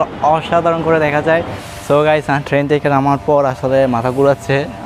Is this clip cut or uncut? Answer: cut